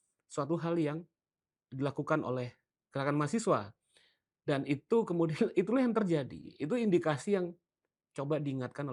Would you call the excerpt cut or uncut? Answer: uncut